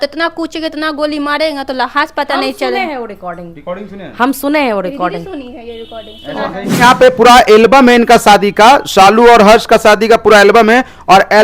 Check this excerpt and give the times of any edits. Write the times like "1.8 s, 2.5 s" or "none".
6.8 s